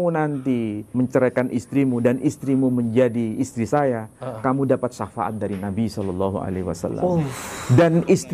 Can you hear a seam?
yes; 1 cut; at 0.9 s

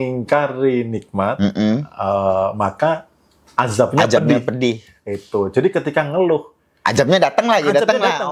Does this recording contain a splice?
no; 0 cuts

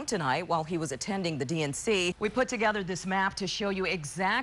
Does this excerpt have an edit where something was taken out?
yes; 1 cut; at 2.2 s

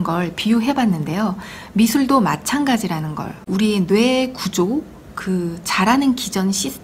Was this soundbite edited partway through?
no; 0 cuts

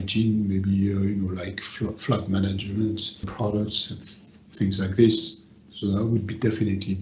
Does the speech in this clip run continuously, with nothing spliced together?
yes; 0 cuts

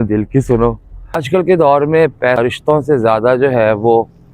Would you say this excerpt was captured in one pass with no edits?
no; 2 cuts; at 1.2 s, 2.4 s

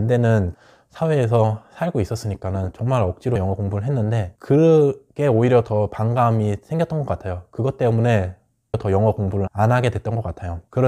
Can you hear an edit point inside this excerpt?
no; 0 cuts

